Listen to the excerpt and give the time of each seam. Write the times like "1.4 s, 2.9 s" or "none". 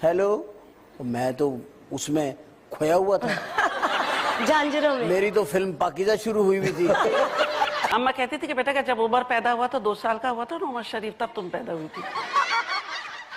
7.8 s